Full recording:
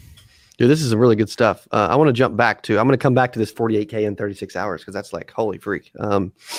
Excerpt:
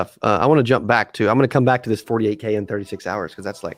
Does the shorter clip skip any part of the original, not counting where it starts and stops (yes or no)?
no